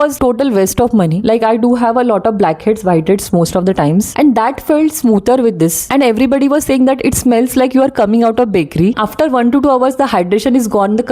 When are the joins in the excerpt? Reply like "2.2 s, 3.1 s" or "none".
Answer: 1.2 s, 5.8 s, 8.9 s